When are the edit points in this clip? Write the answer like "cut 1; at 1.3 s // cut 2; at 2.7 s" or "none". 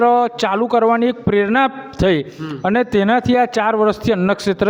none